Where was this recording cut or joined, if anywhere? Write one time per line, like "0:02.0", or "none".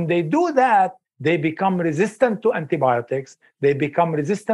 0:01.0